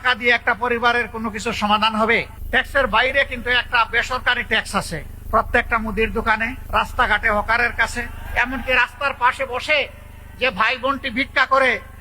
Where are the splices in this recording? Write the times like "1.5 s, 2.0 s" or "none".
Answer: 2.4 s, 5.1 s, 6.6 s, 8.2 s